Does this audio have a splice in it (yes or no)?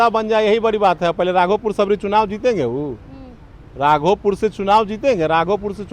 no